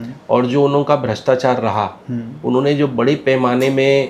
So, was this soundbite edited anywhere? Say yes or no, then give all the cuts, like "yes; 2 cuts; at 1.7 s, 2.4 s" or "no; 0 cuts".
no; 0 cuts